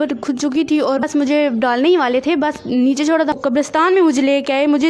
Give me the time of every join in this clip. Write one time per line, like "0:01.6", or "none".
0:01.0
0:03.3